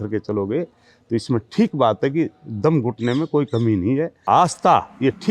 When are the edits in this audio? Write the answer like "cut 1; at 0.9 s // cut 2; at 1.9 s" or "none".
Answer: cut 1; at 4.1 s